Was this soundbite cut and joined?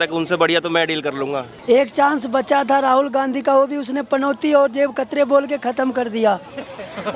yes; 1 cut; at 1.5 s

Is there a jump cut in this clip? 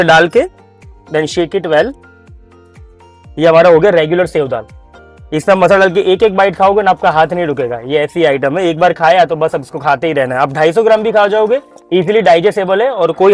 no; 0 cuts

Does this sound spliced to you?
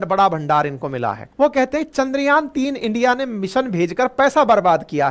yes; 1 cut; at 1.2 s

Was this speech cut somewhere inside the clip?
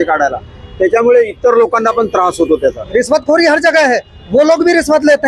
yes; 1 cut; at 2.8 s

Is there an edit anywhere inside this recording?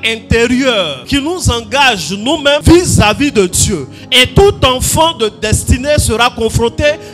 yes; 2 cuts; at 1.0 s, 2.6 s

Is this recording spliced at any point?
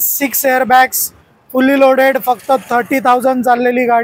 yes; 1 cut; at 1.2 s

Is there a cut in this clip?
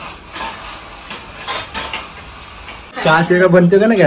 yes; 1 cut; at 2.9 s

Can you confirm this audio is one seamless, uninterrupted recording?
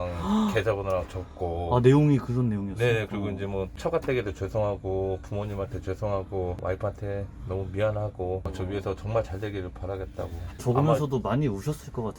no; 1 cut; at 8.4 s

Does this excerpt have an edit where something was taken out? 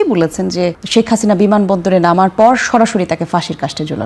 no; 0 cuts

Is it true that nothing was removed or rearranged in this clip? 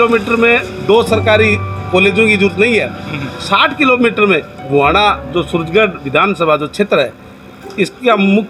yes; 0 cuts

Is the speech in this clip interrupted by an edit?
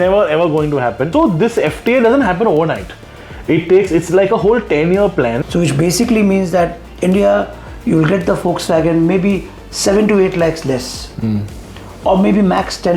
yes; 2 cuts; at 1.1 s, 5.4 s

